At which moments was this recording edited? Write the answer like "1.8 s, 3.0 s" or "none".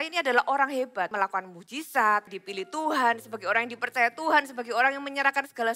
1.1 s, 2.4 s